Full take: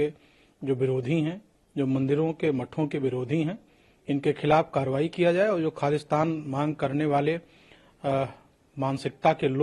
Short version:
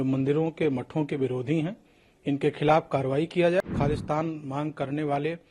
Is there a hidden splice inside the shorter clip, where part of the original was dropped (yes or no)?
yes